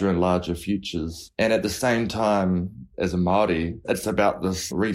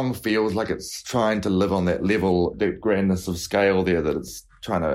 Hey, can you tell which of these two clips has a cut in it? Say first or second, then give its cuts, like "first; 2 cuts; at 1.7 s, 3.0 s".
second; 2 cuts; at 0.9 s, 2.7 s